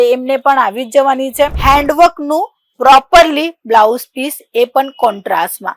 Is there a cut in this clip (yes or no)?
yes